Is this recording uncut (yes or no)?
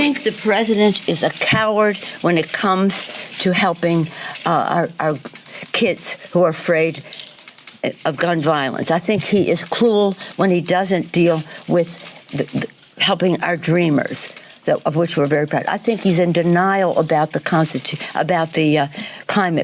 no